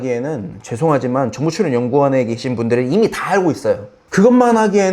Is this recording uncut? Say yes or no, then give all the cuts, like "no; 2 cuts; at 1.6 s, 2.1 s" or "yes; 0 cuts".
no; 1 cut; at 4.0 s